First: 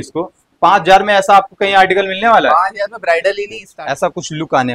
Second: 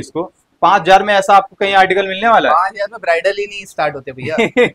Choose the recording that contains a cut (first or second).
first